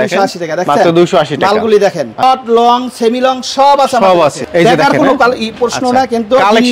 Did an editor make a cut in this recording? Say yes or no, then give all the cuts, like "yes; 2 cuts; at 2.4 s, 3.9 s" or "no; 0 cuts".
yes; 2 cuts; at 2.2 s, 4.4 s